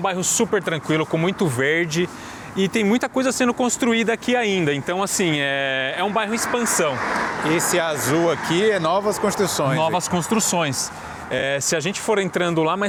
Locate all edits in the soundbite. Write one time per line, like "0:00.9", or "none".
none